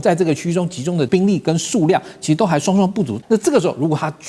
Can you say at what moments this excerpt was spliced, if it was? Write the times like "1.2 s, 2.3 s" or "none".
1.1 s, 3.2 s